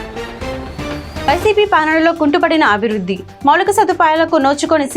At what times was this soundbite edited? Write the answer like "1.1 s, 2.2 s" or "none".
1.3 s